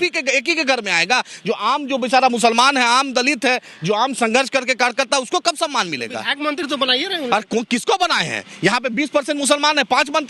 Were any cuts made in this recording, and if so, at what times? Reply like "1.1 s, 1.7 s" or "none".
none